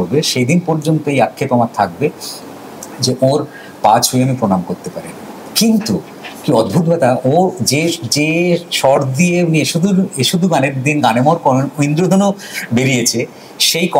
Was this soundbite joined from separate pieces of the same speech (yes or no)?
no